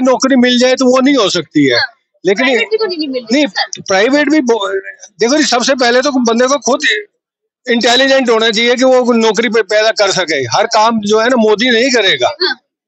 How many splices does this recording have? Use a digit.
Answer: 0